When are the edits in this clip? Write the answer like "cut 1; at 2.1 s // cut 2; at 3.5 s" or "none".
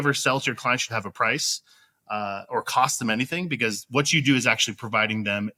none

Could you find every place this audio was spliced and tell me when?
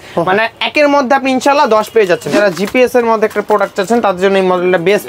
cut 1; at 2.3 s

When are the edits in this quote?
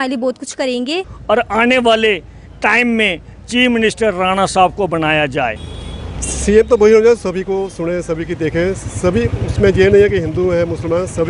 cut 1; at 1.1 s // cut 2; at 5.7 s

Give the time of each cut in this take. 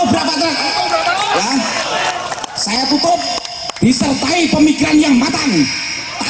none

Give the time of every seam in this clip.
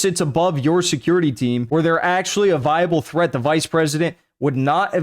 cut 1; at 1.6 s

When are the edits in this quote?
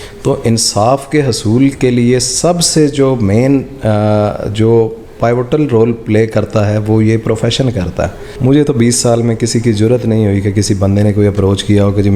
cut 1; at 8.2 s

